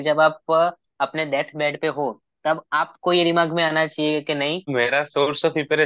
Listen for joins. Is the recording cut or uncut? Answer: cut